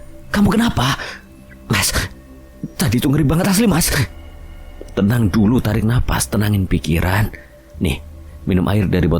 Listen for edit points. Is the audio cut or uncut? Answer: uncut